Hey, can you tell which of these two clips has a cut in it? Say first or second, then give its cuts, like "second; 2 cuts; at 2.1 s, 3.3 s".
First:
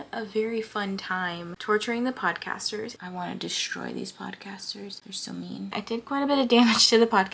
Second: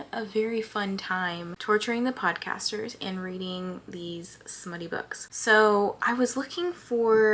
first; 2 cuts; at 3.0 s, 5.8 s